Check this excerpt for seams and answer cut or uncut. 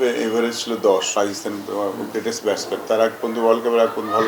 cut